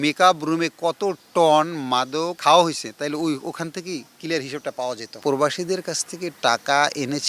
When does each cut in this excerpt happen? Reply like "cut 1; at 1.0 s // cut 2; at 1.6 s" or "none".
cut 1; at 2.3 s // cut 2; at 5.2 s